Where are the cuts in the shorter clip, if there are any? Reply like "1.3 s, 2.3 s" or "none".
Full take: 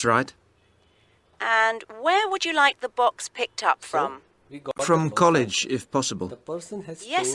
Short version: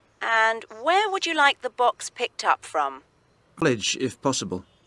3.6 s

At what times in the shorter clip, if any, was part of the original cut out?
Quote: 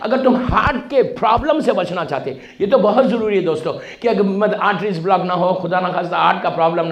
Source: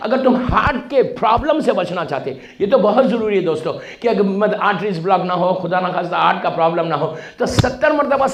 none

